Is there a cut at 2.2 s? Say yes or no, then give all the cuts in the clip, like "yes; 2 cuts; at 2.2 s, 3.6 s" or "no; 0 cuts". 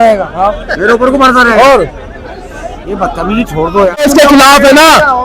no; 1 cut; at 4.0 s